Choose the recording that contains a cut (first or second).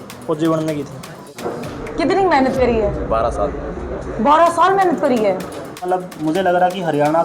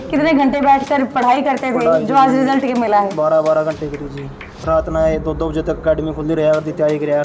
first